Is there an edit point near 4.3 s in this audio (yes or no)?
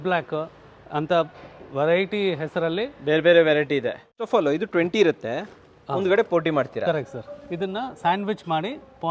yes